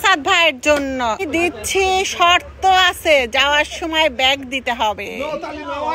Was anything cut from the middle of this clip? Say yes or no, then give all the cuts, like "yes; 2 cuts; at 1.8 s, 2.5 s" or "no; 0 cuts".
no; 0 cuts